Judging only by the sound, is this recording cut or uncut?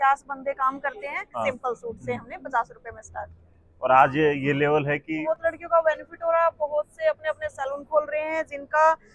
cut